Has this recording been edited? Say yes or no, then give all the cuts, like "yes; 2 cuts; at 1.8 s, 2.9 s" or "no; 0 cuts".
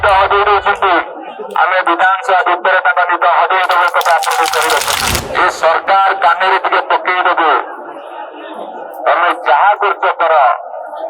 yes; 1 cut; at 5.1 s